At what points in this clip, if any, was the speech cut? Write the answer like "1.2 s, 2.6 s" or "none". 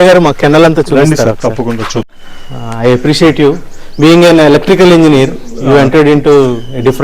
2.2 s